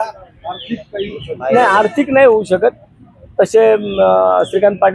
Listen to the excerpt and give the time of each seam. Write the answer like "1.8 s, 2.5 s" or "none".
none